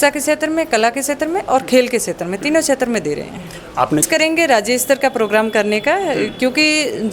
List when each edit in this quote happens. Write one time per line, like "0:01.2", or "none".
0:04.0